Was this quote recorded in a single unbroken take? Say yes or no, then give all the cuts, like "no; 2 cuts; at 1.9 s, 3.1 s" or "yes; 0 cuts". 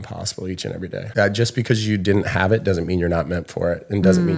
no; 1 cut; at 1.1 s